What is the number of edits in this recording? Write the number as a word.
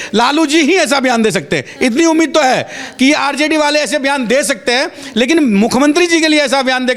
zero